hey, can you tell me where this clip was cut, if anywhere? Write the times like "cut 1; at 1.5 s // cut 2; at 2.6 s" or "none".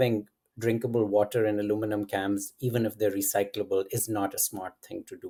none